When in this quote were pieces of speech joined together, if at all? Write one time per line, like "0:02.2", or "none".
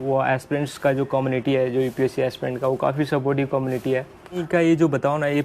0:04.4